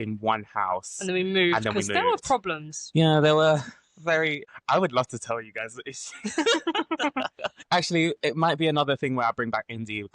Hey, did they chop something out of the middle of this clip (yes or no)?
yes